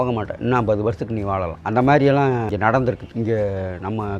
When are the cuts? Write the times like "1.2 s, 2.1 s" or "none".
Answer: 3.1 s